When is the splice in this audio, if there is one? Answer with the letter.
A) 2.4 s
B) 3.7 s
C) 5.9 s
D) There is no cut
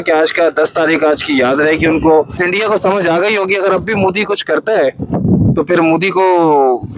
A